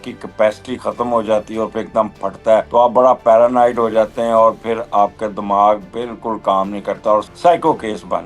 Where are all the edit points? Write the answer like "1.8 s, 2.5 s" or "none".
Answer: 2.7 s, 7.3 s

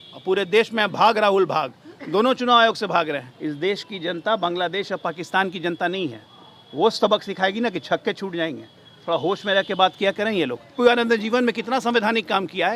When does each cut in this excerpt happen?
3.3 s, 10.7 s

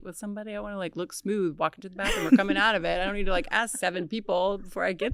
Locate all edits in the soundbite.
none

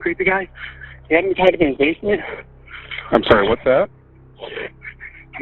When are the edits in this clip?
none

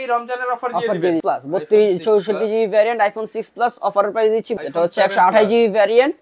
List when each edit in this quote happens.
1.2 s, 4.5 s

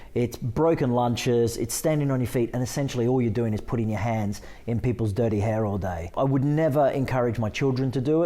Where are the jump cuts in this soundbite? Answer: 6.1 s

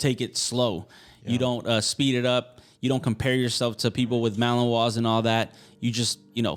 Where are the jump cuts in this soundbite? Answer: none

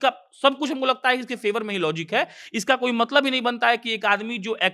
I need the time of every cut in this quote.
none

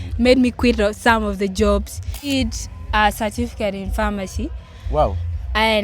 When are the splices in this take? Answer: 2.3 s

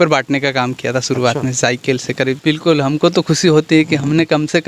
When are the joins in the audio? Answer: 2.4 s

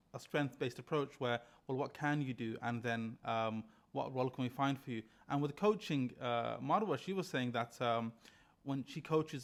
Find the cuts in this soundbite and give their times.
none

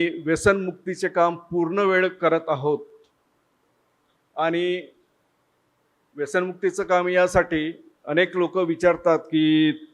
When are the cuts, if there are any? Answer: none

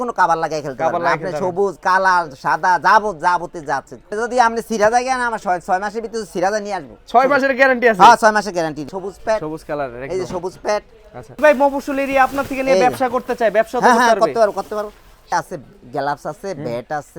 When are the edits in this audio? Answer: 4.1 s, 8.9 s, 11.4 s, 15.3 s

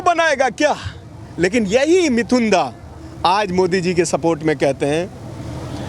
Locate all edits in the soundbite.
none

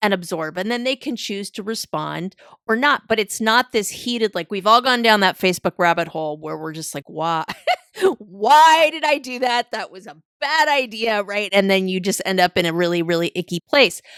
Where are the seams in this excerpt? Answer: none

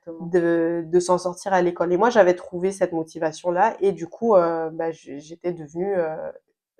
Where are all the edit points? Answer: none

